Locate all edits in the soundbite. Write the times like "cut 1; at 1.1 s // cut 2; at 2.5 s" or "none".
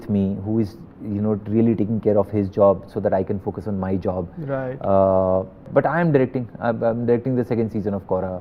none